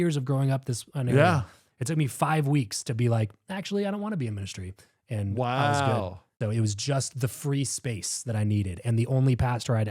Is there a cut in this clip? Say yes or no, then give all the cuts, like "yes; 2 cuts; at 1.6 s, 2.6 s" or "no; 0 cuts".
yes; 1 cut; at 6.2 s